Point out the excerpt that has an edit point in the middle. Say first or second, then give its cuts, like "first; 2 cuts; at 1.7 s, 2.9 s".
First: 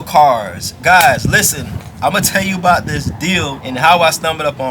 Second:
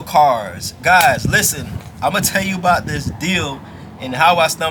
first; 1 cut; at 3.6 s